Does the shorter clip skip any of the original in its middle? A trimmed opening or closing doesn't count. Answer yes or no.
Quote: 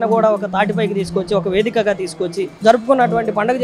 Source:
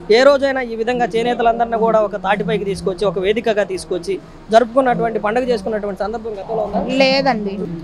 yes